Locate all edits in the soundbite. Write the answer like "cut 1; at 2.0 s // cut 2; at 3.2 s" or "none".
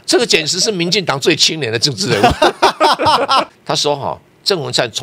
cut 1; at 3.5 s